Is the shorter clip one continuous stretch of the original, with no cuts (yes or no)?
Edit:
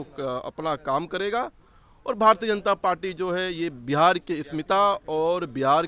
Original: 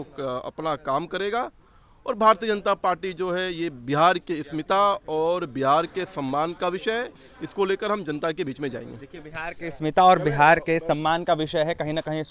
yes